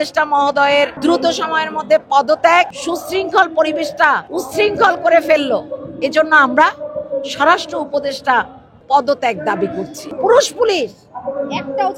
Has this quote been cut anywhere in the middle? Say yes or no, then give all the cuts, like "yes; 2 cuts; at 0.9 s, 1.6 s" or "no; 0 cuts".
yes; 5 cuts; at 0.9 s, 2.8 s, 4.3 s, 8.7 s, 10.0 s